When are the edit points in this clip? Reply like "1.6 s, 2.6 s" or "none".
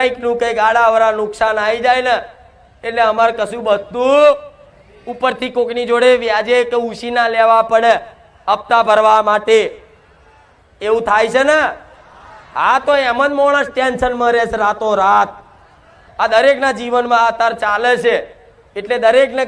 16.0 s